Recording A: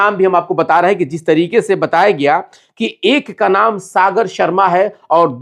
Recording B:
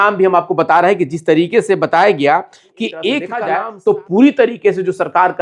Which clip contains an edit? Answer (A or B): B